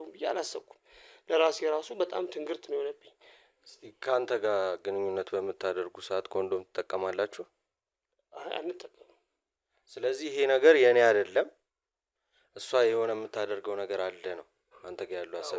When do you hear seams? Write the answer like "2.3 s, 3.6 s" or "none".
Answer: none